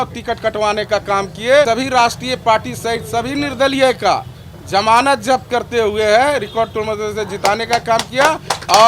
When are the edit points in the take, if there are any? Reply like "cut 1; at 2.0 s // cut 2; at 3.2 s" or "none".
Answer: cut 1; at 1.7 s